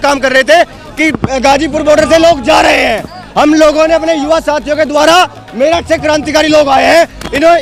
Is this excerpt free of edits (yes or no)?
yes